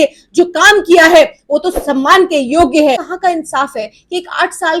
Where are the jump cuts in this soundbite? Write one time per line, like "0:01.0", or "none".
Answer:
0:03.1